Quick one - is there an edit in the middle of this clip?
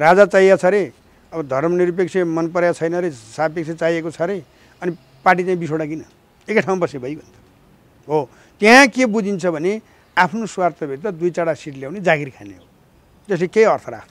no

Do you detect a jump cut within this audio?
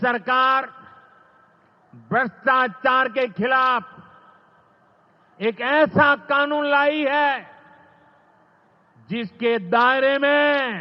no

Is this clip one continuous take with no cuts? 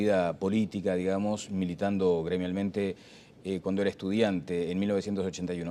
yes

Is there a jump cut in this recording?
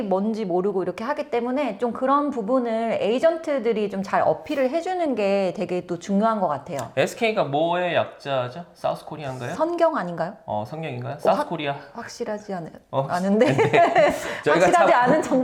no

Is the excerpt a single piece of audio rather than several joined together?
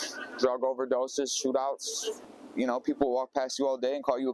no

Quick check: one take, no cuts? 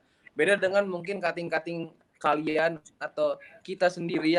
yes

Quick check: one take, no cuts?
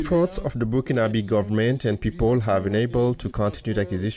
yes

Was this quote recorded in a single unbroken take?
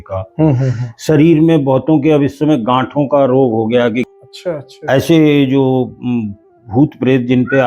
no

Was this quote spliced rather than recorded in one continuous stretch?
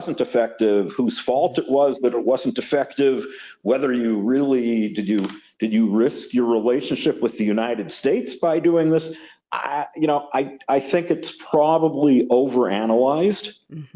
no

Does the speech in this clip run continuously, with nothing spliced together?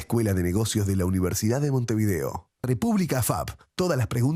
no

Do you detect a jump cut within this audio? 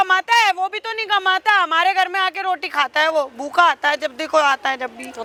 no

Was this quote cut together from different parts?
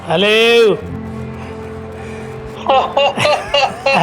no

